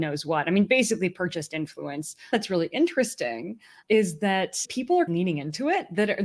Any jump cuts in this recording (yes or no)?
yes